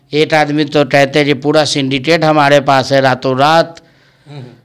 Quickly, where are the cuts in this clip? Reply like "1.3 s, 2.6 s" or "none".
none